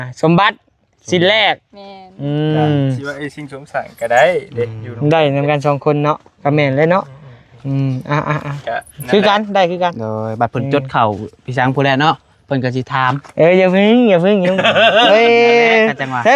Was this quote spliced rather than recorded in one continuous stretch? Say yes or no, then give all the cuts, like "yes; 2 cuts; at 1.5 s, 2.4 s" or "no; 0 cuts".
no; 0 cuts